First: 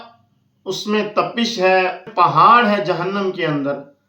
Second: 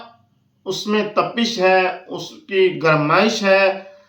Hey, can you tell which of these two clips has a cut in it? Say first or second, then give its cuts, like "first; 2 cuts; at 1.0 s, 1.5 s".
first; 1 cut; at 2.1 s